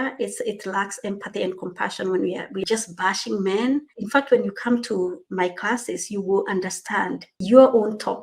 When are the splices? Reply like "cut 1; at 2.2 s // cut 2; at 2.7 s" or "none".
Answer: cut 1; at 2.6 s // cut 2; at 4.0 s // cut 3; at 5.2 s // cut 4; at 7.3 s